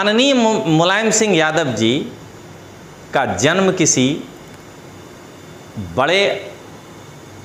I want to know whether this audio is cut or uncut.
uncut